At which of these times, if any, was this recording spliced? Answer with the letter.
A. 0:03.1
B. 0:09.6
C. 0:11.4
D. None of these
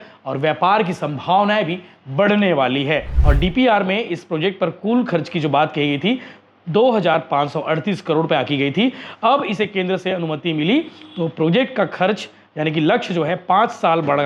A